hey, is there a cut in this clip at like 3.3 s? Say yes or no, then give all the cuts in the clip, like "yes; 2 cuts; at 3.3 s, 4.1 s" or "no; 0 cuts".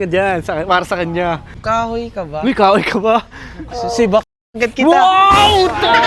no; 1 cut; at 1.5 s